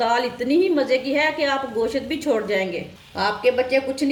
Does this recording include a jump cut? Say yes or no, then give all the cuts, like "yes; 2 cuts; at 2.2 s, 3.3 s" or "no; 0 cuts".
no; 0 cuts